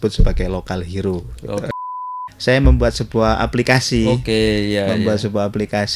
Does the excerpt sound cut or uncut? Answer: cut